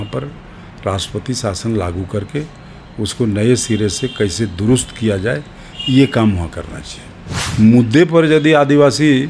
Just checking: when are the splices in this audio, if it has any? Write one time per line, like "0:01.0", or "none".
0:07.4